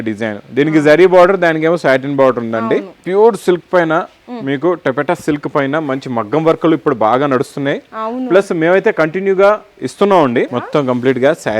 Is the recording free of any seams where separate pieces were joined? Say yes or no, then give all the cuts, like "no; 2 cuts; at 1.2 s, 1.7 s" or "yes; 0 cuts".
no; 2 cuts; at 3.0 s, 10.6 s